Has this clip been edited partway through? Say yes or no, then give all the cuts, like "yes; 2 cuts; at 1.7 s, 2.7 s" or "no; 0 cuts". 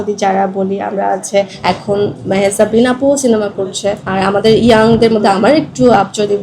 yes; 2 cuts; at 1.5 s, 4.0 s